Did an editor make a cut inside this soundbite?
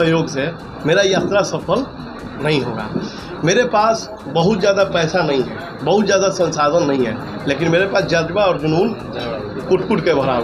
no; 0 cuts

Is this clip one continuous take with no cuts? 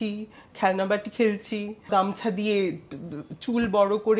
no; 1 cut; at 1.9 s

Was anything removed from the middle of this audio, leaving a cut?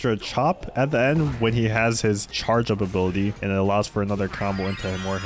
yes; 2 cuts; at 2.3 s, 3.4 s

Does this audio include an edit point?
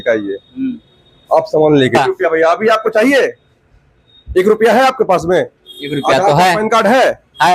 yes; 1 cut; at 2.0 s

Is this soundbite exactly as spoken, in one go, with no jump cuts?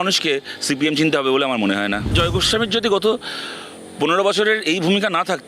no; 1 cut; at 2.1 s

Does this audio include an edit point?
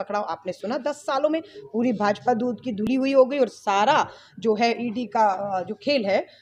no; 0 cuts

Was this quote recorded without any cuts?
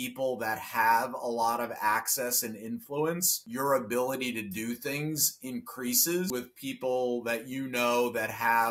no; 2 cuts; at 3.4 s, 6.3 s

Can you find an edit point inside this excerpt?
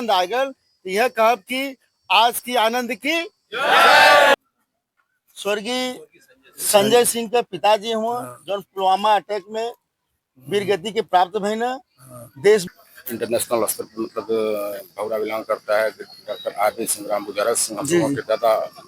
yes; 2 cuts; at 4.3 s, 12.7 s

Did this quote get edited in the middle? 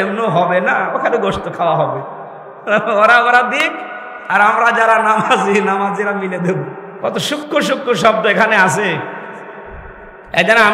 yes; 1 cut; at 6.8 s

